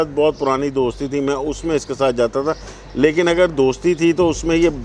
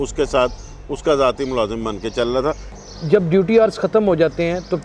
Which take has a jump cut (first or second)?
second